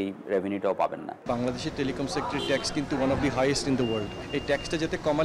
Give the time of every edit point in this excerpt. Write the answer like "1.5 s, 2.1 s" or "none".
1.1 s, 4.2 s